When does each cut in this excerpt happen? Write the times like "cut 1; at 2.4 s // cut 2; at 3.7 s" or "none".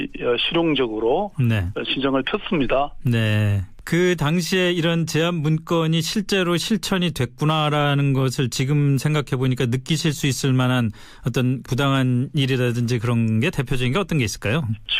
cut 1; at 3.4 s